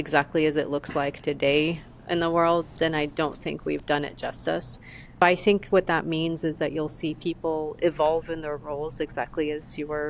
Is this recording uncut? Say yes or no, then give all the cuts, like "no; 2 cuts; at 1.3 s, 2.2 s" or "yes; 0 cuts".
no; 1 cut; at 5.2 s